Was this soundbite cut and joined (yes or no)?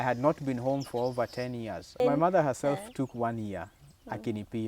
yes